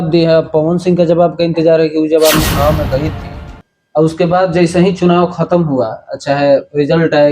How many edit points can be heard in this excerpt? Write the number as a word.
one